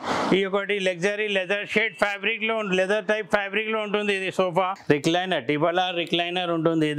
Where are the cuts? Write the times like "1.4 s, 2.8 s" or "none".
4.8 s